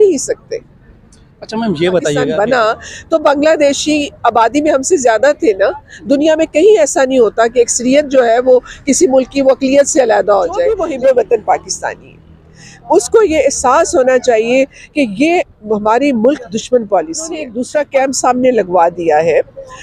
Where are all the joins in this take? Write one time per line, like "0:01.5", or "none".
0:02.2
0:10.8
0:17.5

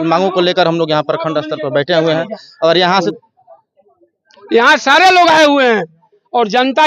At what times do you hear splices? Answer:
0:03.1

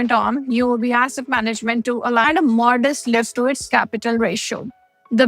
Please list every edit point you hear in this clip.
0:02.2

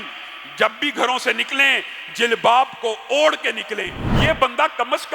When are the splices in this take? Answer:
0:04.1

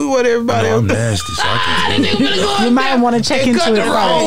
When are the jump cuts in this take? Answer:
none

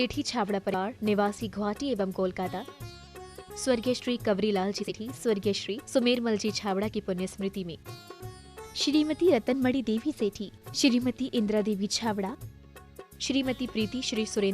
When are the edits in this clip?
0:00.7
0:04.9

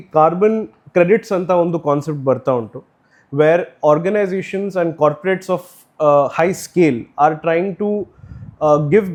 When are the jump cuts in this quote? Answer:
none

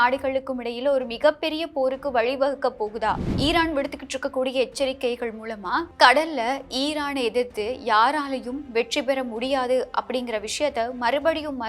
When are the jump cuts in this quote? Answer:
0:03.3

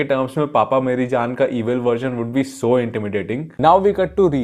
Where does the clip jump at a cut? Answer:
0:03.5

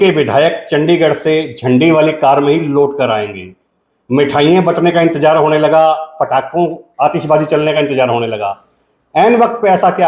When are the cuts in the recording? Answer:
none

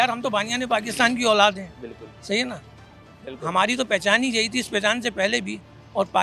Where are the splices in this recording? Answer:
none

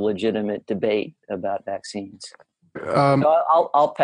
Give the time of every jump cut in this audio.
0:02.8

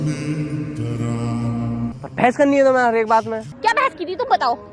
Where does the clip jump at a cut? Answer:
0:01.9
0:03.5

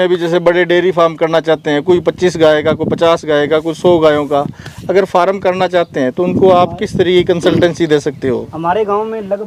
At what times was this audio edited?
none

